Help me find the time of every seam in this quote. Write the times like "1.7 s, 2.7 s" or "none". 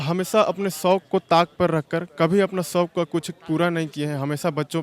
none